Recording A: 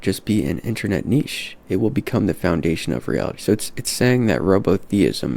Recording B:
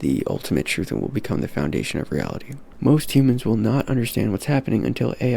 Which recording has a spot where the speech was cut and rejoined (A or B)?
B